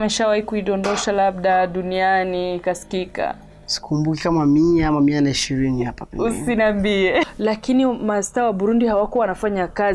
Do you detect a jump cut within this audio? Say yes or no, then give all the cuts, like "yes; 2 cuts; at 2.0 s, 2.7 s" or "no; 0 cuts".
yes; 1 cut; at 7.3 s